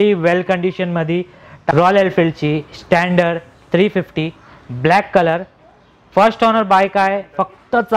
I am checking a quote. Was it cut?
yes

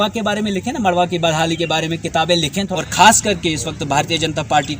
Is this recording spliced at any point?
yes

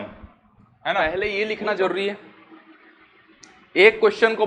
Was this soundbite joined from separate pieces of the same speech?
yes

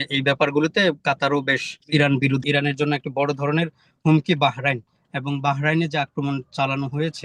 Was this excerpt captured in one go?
no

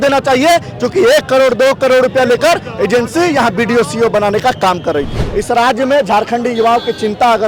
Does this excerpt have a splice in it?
yes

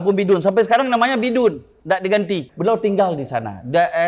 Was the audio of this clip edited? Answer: yes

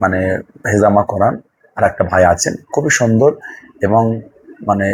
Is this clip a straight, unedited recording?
yes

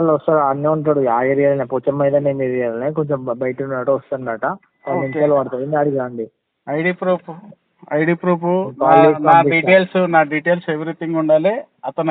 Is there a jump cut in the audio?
no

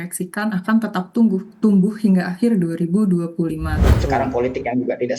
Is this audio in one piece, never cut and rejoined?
no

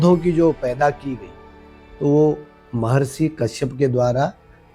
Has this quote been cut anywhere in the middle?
no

